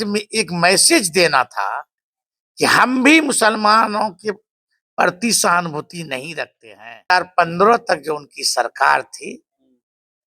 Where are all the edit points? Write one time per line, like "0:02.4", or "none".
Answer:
0:07.1